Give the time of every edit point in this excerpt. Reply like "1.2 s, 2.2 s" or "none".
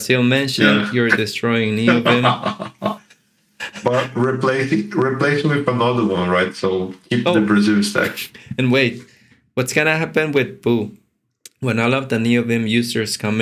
none

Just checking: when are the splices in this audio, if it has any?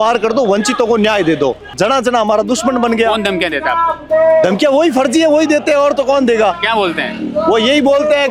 1.7 s

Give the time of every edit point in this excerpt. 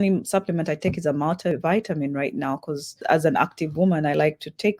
1.5 s, 3.0 s

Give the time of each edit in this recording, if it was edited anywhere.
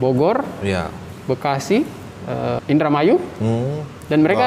none

